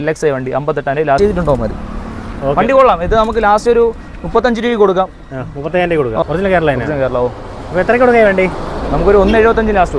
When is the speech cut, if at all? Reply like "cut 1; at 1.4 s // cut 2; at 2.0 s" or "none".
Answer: cut 1; at 1.2 s // cut 2; at 6.2 s